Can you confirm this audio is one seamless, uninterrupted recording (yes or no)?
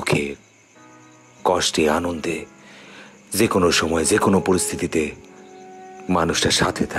yes